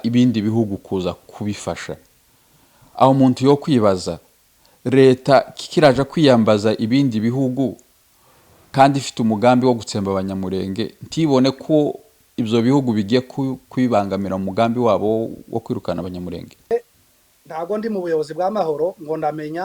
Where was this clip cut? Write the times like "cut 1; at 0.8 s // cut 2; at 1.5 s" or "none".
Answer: cut 1; at 16.7 s